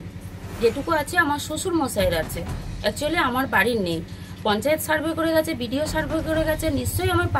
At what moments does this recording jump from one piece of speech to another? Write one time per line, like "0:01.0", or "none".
none